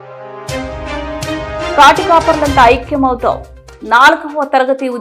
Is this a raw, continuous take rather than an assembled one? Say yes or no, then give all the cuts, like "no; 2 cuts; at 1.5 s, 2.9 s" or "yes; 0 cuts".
no; 1 cut; at 1.8 s